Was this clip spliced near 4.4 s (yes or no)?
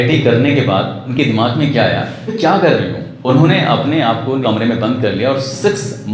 yes